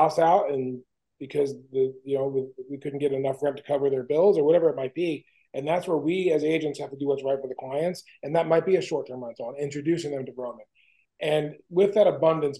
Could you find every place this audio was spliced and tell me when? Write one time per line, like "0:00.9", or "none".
none